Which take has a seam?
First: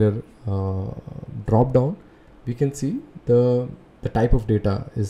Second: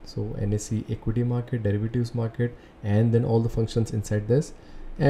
first; 1 cut; at 3.1 s

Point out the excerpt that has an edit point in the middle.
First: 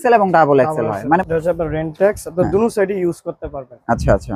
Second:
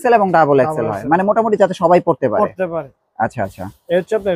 first; 1 cut; at 1.2 s

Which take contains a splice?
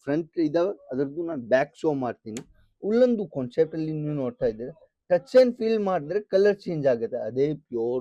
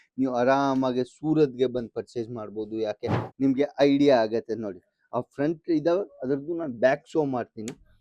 second; 1 cut; at 3.2 s

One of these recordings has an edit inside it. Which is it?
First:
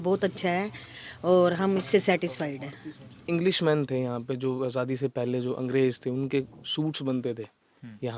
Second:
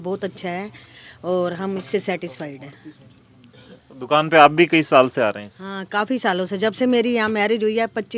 first; 1 cut; at 3.2 s

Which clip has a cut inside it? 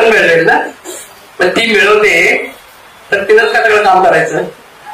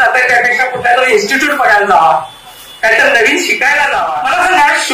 second; 1 cut; at 4.0 s

